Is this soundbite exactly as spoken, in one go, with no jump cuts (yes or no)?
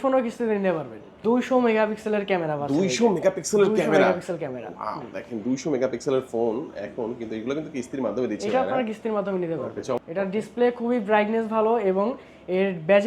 no